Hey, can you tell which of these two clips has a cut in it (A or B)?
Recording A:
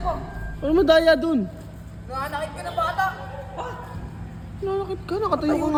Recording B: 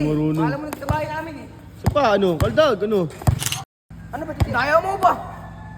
B